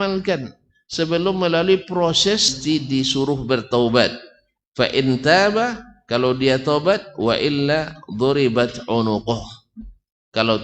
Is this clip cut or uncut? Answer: cut